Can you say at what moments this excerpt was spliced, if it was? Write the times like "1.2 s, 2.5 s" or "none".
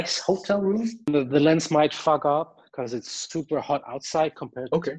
1.1 s